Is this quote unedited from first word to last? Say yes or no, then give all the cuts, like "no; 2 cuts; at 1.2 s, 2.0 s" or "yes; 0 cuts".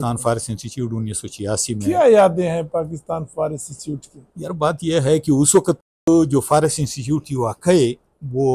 yes; 0 cuts